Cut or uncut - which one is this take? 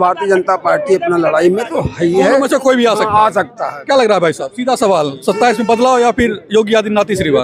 uncut